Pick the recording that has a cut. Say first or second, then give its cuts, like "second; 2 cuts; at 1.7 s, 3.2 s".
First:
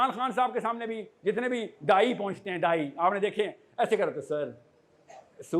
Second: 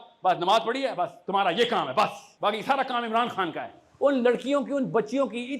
second; 2 cuts; at 2.2 s, 3.8 s